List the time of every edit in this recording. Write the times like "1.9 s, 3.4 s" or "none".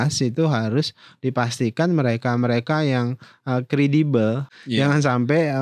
4.5 s